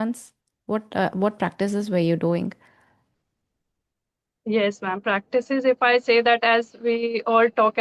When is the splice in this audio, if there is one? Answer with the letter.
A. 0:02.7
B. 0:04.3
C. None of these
C